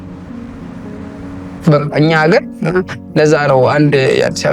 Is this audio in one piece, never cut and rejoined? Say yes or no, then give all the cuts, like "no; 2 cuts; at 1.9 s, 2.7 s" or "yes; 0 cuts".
yes; 0 cuts